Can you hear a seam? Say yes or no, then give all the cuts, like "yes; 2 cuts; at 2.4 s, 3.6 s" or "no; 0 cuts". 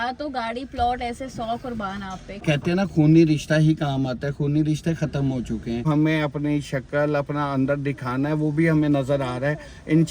yes; 2 cuts; at 2.4 s, 5.9 s